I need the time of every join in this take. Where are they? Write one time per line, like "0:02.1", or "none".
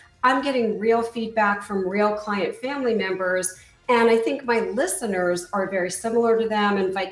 none